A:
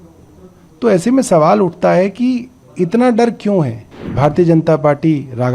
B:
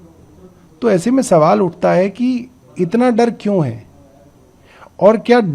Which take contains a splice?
A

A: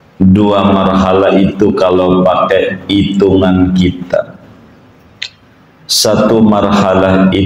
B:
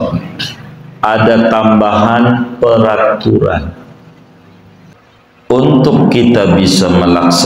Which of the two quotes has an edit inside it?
B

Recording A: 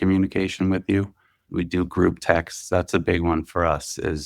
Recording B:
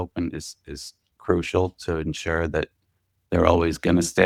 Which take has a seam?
A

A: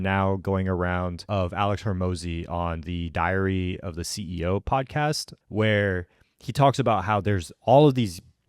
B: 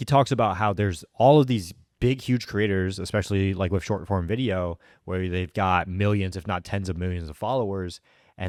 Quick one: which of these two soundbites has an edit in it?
A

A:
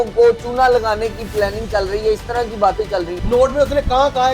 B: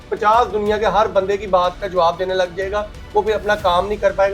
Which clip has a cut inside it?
A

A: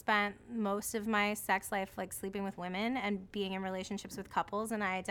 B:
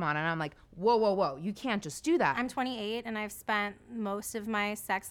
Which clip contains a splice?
B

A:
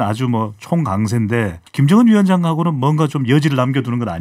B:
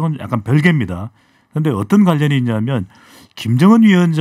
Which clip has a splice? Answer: A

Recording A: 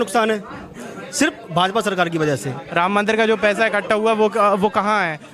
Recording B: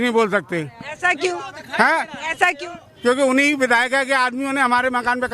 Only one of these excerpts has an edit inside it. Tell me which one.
A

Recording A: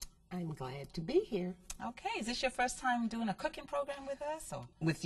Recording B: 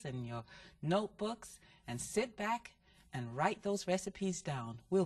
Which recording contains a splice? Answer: A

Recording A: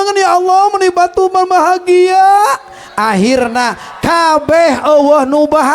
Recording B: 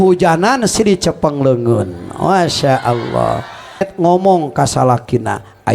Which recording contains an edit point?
B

